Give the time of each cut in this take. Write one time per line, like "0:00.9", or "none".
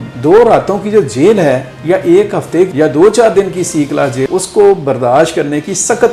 none

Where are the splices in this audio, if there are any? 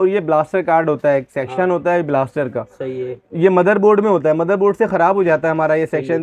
none

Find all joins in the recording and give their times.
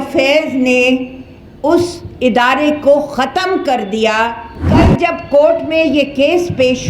0:04.6

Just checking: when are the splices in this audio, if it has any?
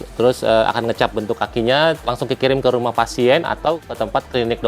0:02.0

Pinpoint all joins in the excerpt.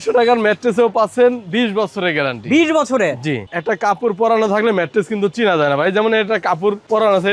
0:03.4

